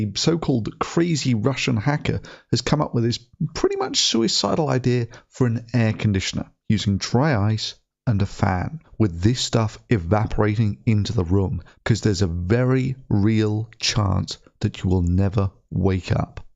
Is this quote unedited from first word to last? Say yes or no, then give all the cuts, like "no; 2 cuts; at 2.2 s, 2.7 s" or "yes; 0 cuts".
no; 1 cut; at 8.8 s